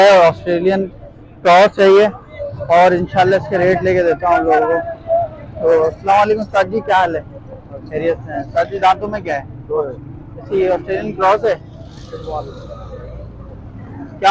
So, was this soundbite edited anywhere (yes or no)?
no